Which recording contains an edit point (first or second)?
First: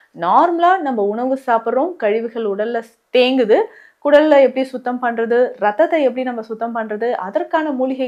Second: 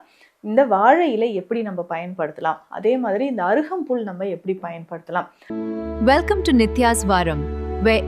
second